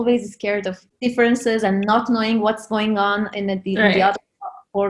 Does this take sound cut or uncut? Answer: uncut